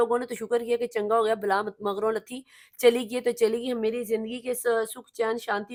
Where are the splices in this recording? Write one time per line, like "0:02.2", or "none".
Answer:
none